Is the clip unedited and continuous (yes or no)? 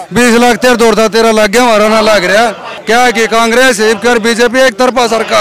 no